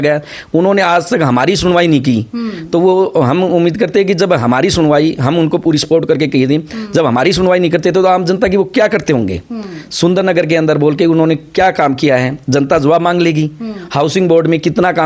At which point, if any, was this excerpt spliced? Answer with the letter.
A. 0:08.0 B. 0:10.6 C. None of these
C